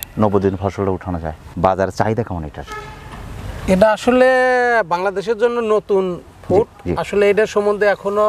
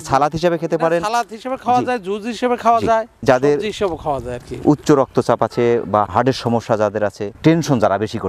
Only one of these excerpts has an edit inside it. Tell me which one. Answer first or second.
first